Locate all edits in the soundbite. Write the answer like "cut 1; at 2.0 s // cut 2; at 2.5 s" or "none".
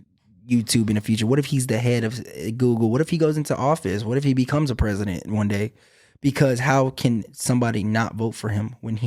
none

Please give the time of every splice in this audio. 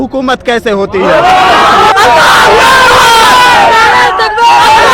cut 1; at 1.9 s

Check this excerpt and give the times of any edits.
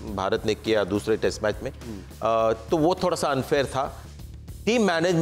none

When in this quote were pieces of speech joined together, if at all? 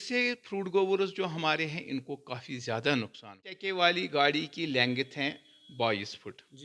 cut 1; at 3.6 s

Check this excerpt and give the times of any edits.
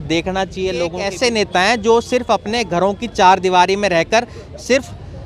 cut 1; at 1.0 s

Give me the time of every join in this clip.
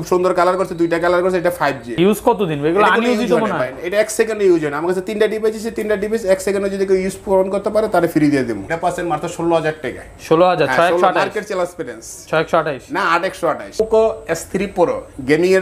cut 1; at 2.0 s // cut 2; at 8.6 s // cut 3; at 13.8 s

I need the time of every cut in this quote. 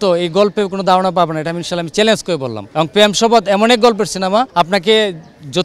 cut 1; at 2.6 s // cut 2; at 4.5 s

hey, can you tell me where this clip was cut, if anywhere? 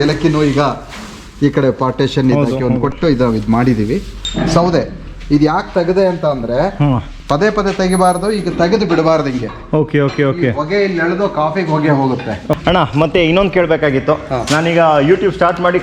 cut 1; at 4.2 s // cut 2; at 12.5 s

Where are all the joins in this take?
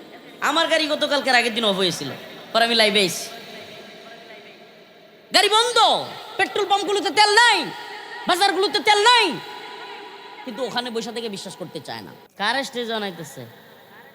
cut 1; at 12.2 s

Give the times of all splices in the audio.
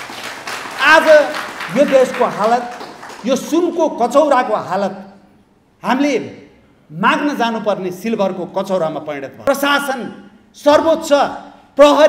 cut 1; at 9.3 s

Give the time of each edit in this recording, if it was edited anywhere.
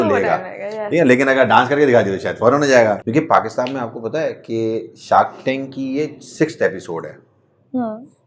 cut 1; at 3.0 s

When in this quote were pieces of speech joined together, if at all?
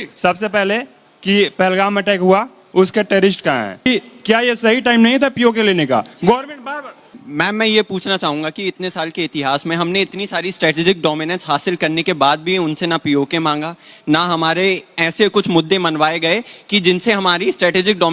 cut 1; at 3.8 s // cut 2; at 7.1 s

